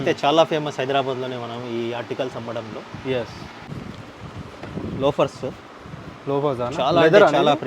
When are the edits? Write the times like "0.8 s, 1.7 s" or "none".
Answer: 3.5 s